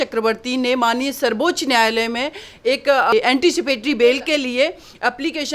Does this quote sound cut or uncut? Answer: uncut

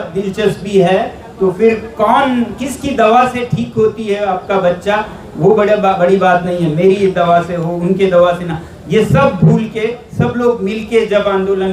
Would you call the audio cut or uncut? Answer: uncut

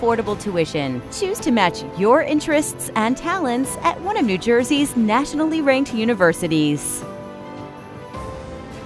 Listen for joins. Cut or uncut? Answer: cut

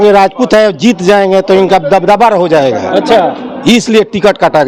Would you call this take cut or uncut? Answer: uncut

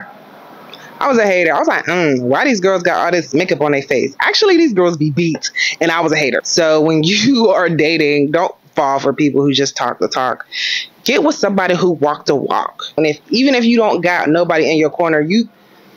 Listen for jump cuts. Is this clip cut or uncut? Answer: cut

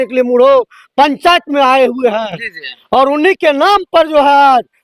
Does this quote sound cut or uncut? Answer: uncut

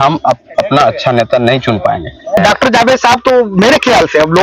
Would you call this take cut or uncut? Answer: cut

